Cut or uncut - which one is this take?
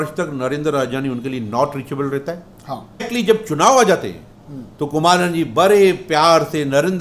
cut